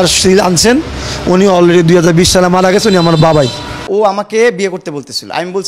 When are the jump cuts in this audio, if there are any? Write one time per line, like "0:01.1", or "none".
0:03.8